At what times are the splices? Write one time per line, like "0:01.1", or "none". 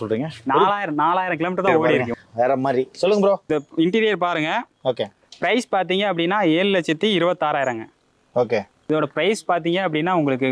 0:01.8
0:08.7